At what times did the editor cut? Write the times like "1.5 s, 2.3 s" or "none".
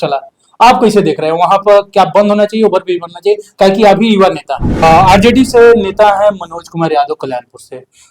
4.8 s